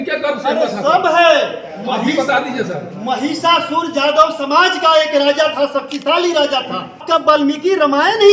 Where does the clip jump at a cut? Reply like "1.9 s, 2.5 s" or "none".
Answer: 7.0 s